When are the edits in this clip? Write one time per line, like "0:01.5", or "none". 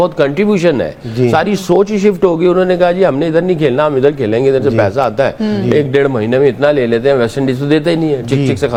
none